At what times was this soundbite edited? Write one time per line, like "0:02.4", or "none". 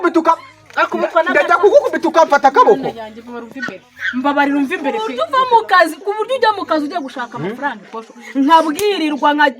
0:05.2